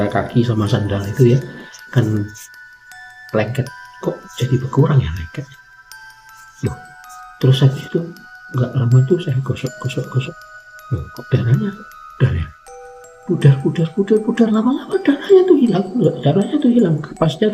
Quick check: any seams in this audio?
no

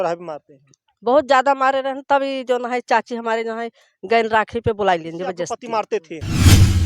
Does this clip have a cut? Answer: yes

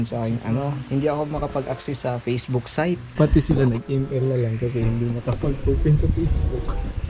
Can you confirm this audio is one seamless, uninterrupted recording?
no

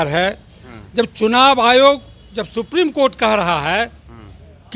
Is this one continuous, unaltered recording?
yes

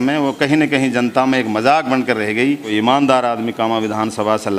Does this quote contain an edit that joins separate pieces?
yes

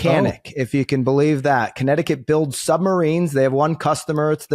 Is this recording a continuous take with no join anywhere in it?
yes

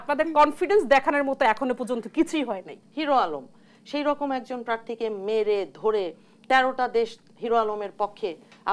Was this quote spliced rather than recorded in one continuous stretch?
yes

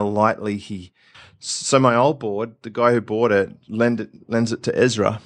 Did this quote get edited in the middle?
yes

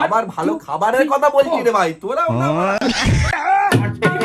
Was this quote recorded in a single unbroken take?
yes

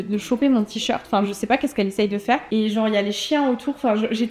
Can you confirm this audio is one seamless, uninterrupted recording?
yes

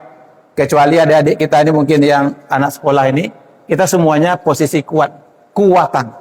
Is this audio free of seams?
yes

